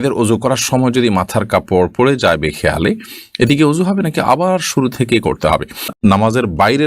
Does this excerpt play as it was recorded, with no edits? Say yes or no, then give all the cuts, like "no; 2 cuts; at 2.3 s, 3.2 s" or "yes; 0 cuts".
no; 1 cut; at 6.0 s